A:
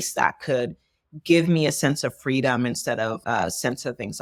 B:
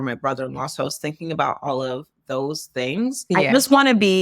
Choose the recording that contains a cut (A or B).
B